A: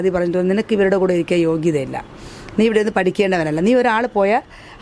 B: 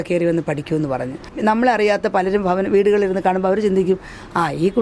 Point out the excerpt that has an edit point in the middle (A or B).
B